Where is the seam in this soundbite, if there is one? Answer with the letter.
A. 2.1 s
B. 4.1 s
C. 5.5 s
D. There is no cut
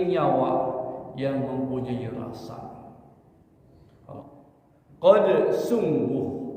B